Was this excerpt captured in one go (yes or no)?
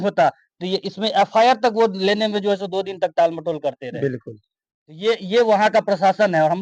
yes